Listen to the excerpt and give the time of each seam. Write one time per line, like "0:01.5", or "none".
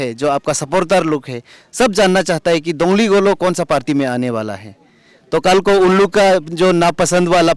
none